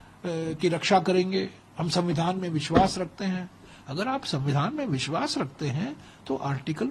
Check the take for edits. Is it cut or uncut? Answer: uncut